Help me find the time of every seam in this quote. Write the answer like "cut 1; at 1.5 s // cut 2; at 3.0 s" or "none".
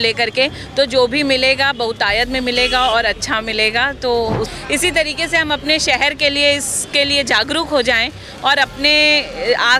cut 1; at 4.5 s